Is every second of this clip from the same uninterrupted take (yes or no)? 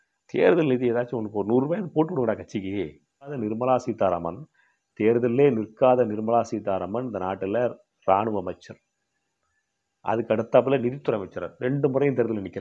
no